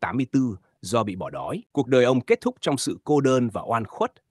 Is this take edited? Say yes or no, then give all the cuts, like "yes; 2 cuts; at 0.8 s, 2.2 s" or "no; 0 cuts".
yes; 1 cut; at 1.6 s